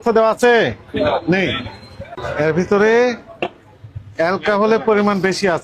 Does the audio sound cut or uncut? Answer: cut